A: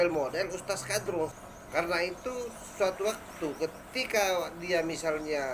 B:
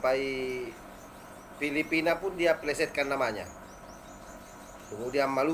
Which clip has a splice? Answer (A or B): A